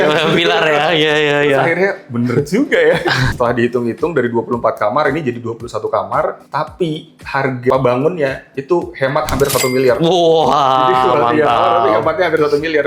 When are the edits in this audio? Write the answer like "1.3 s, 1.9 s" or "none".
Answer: 3.3 s, 7.7 s